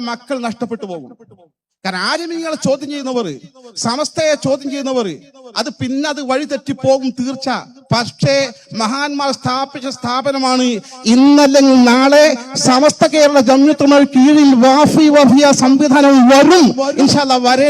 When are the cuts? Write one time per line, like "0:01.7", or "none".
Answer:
none